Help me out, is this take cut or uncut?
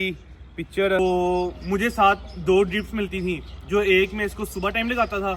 cut